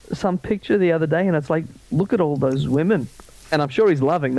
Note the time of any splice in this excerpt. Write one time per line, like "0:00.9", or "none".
0:03.3